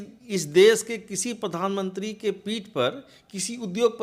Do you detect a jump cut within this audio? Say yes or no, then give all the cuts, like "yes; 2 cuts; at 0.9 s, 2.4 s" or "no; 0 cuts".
no; 0 cuts